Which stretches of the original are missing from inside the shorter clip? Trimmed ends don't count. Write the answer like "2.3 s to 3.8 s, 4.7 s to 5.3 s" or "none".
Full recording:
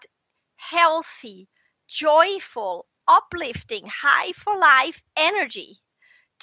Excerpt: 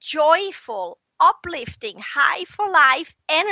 none